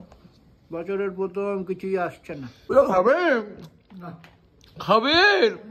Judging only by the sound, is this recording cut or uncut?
cut